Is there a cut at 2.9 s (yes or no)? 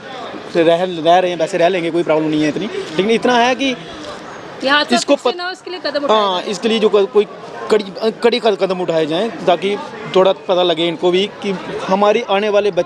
no